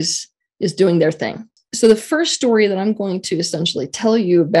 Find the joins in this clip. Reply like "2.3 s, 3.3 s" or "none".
1.6 s